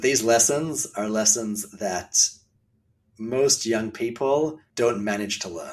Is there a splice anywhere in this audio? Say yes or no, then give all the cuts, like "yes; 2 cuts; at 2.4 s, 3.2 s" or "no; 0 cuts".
yes; 1 cut; at 4.6 s